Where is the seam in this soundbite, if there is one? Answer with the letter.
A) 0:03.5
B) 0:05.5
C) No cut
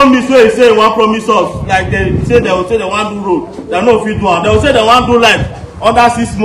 C